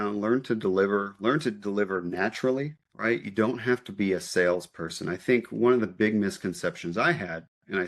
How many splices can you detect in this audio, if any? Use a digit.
0